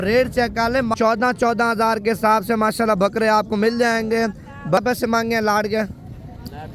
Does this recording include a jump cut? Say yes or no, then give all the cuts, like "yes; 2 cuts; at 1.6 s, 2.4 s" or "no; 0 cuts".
yes; 2 cuts; at 0.9 s, 4.8 s